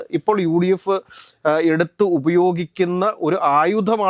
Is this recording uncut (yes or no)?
yes